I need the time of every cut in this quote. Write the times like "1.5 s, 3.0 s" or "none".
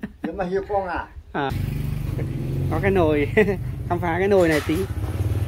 1.5 s